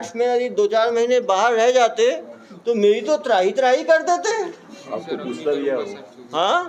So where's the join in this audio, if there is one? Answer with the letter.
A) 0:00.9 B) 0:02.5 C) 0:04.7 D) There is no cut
D